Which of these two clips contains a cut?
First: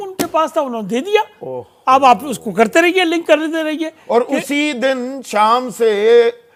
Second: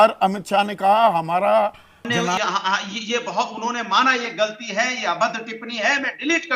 second; 1 cut; at 2.2 s

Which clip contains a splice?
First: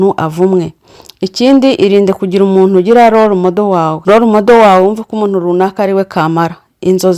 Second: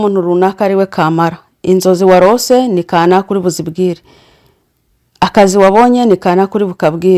first; 1 cut; at 4.0 s

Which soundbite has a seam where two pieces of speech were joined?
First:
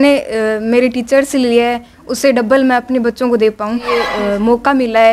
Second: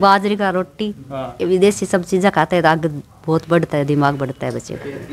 first; 1 cut; at 4.0 s

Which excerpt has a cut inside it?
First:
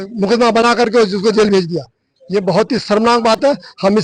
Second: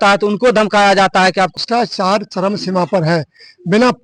second; 1 cut; at 1.6 s

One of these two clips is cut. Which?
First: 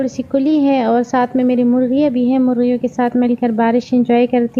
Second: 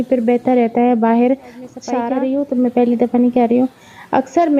second; 1 cut; at 1.8 s

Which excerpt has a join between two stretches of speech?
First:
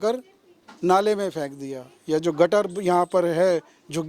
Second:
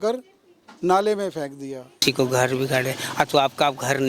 second; 1 cut; at 2.0 s

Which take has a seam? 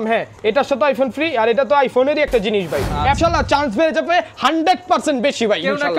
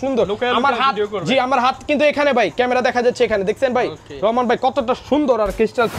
first; 1 cut; at 3.2 s

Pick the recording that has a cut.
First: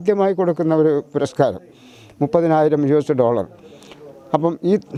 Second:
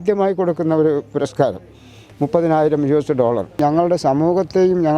second; 1 cut; at 3.6 s

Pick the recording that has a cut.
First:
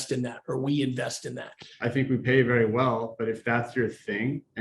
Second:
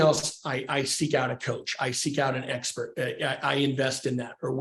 first; 1 cut; at 1.6 s

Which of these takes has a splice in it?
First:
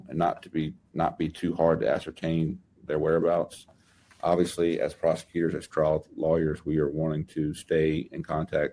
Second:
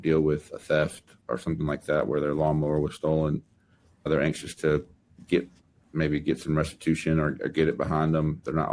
second; 2 cuts; at 1.2 s, 4.1 s

